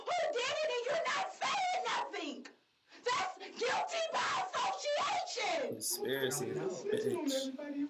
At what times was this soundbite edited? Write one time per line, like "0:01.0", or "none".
0:06.0